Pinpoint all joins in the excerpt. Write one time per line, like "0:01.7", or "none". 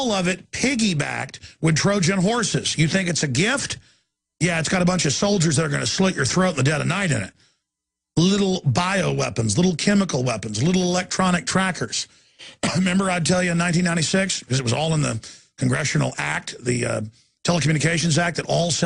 0:10.7